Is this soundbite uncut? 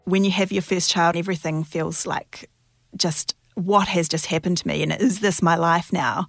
no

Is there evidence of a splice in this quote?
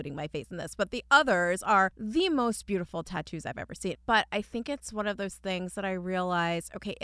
yes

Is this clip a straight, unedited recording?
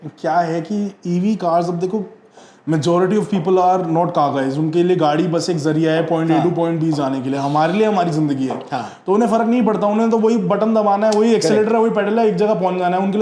yes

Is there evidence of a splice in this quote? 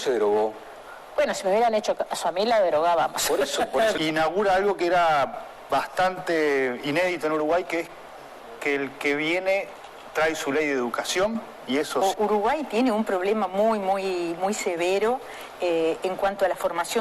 yes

